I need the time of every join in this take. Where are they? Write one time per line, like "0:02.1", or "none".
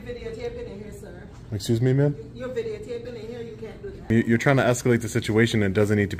0:04.1

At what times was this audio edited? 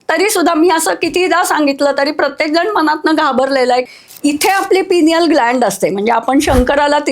0:03.8

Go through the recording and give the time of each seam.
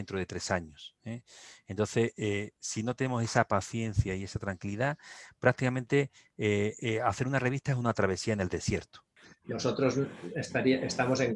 0:09.1

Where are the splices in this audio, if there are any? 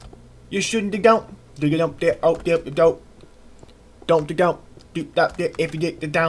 0:04.2

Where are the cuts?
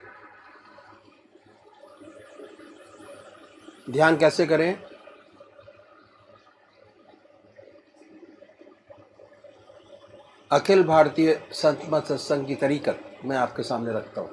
0:11.1

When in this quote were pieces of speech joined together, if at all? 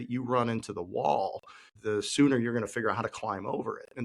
0:01.7

